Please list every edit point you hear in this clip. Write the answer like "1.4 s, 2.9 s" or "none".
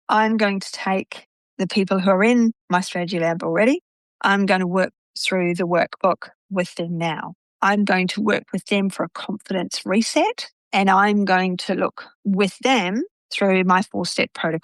none